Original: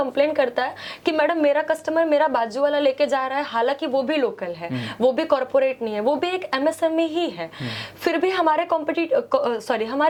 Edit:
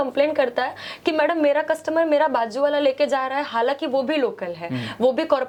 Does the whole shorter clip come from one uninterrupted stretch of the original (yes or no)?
yes